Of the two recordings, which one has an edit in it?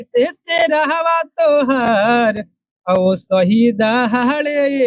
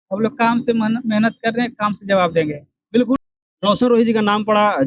second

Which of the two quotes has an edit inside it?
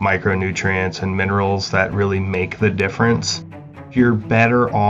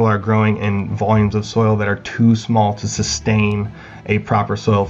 first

